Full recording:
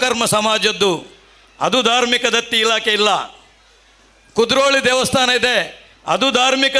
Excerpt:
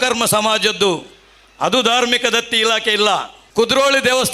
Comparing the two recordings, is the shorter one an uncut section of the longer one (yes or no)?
no